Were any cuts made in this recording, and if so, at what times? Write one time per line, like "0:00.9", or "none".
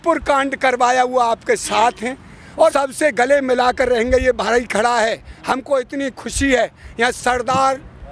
0:02.7